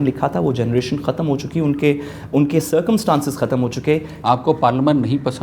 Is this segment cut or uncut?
cut